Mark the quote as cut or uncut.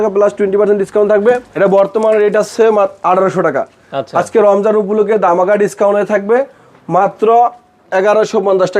cut